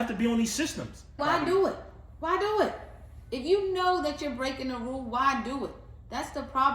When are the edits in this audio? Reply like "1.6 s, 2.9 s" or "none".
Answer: 1.2 s